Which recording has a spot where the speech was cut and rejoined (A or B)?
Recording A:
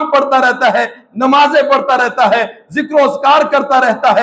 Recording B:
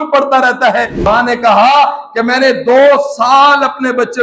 B